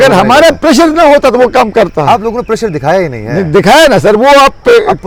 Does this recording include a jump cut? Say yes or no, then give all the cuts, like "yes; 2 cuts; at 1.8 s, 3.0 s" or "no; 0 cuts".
no; 0 cuts